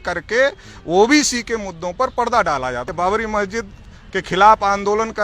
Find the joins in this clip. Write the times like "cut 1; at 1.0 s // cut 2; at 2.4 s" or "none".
cut 1; at 2.9 s